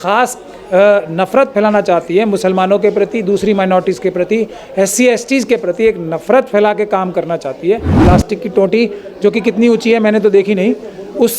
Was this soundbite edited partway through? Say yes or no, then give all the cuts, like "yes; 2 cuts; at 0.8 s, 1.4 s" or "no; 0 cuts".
yes; 1 cut; at 8.0 s